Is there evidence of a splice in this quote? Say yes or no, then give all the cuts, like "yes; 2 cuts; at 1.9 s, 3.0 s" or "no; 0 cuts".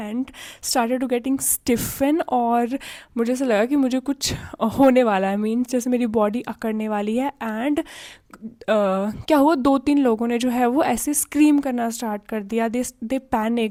no; 0 cuts